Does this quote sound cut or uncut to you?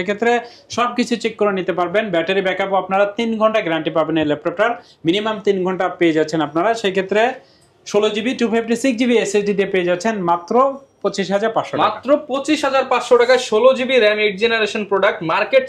uncut